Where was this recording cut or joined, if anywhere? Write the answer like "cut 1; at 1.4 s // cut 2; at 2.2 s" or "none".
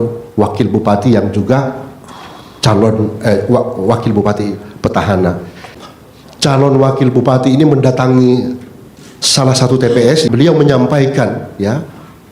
cut 1; at 5.6 s // cut 2; at 10.3 s

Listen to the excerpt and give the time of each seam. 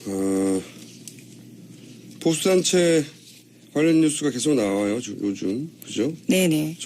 cut 1; at 2.9 s

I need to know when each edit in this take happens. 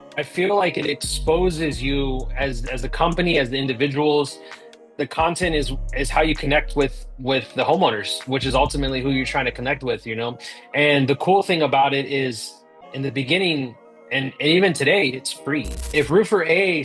cut 1; at 15.8 s

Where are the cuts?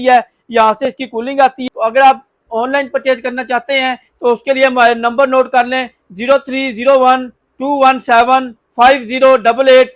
cut 1; at 1.5 s

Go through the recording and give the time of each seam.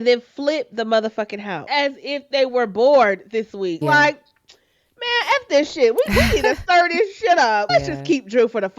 cut 1; at 1.7 s // cut 2; at 3.8 s // cut 3; at 7.7 s

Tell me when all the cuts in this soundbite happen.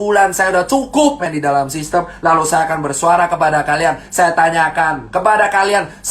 cut 1; at 1.2 s

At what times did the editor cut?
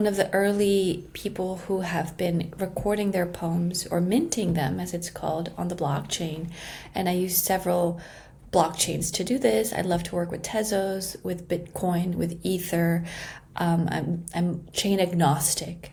none

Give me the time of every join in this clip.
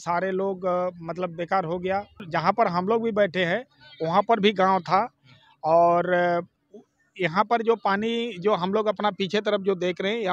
cut 1; at 2.2 s

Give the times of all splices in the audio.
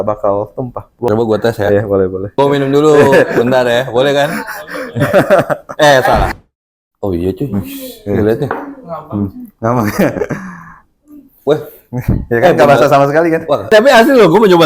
cut 1; at 1.1 s // cut 2; at 2.3 s // cut 3; at 6.3 s // cut 4; at 13.7 s

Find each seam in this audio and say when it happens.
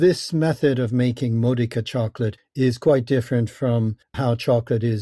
cut 1; at 4.0 s

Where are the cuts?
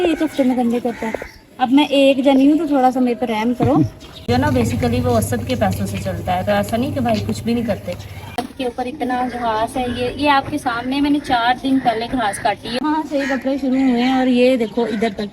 cut 1; at 4.3 s // cut 2; at 8.4 s // cut 3; at 12.7 s

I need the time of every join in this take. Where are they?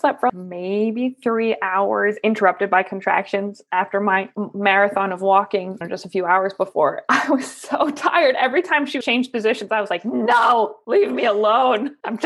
cut 1; at 5.8 s // cut 2; at 9.0 s

